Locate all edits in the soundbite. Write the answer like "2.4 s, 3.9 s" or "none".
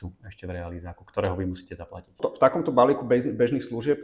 none